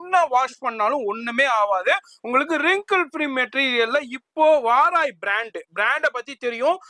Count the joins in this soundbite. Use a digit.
0